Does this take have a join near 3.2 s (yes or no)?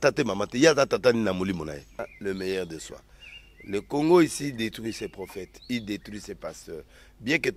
no